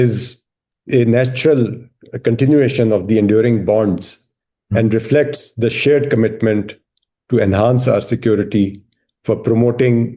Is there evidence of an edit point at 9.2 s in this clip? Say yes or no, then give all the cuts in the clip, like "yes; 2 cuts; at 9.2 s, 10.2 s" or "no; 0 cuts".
no; 0 cuts